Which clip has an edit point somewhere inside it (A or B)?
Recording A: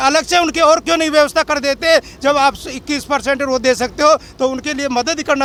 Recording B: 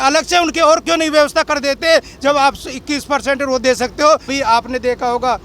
B